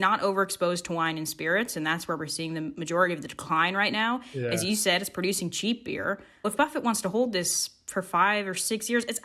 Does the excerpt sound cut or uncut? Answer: cut